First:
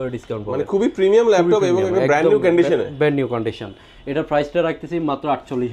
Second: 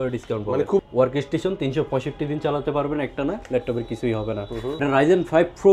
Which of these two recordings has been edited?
second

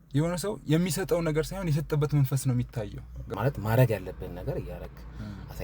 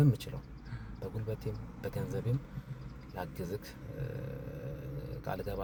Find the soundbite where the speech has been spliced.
first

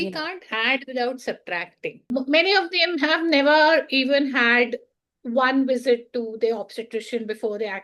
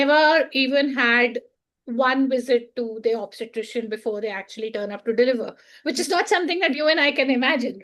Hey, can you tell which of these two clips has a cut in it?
first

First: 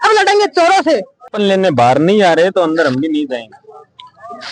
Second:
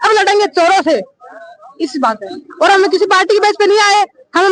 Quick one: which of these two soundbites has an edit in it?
first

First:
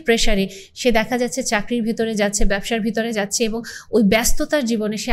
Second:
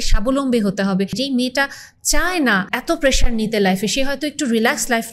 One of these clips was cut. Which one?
second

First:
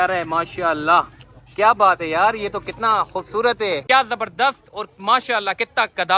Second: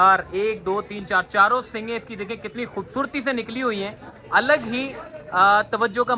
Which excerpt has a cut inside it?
first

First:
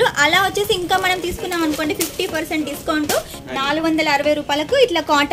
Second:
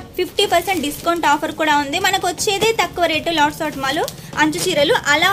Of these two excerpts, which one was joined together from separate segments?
first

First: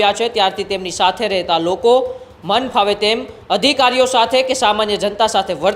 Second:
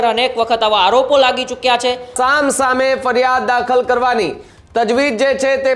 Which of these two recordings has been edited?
second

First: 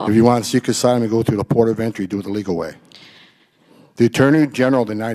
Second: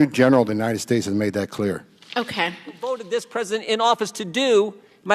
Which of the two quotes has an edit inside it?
second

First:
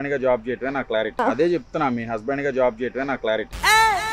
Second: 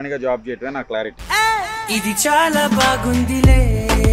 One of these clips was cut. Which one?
second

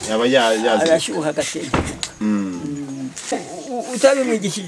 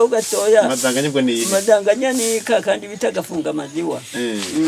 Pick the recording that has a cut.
first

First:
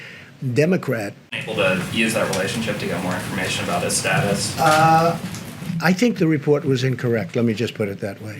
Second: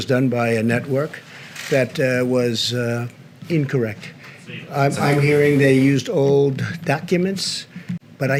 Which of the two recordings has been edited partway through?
first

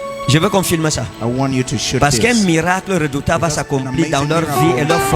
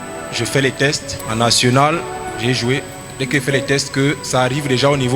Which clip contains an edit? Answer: second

